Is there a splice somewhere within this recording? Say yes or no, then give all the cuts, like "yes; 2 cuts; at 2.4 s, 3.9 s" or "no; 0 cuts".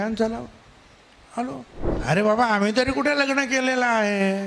yes; 1 cut; at 1.8 s